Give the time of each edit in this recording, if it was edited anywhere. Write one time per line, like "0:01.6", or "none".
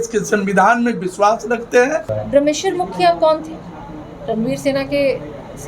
0:02.1